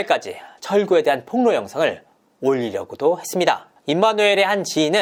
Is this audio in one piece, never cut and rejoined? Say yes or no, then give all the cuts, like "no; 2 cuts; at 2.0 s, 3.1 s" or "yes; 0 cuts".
yes; 0 cuts